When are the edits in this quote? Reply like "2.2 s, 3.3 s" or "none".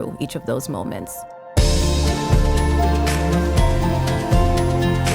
1.1 s